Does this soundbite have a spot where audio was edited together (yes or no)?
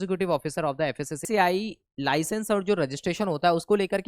yes